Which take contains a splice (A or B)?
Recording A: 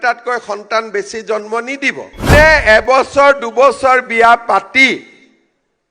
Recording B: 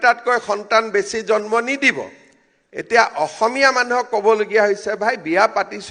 A